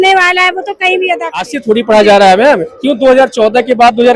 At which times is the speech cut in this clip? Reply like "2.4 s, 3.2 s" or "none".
1.5 s